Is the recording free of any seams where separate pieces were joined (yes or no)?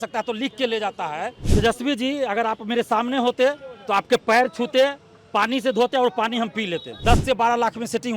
no